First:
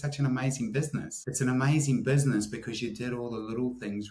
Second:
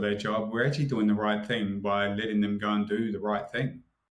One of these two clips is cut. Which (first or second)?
first